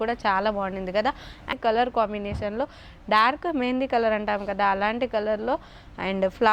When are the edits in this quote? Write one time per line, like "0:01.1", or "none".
0:01.5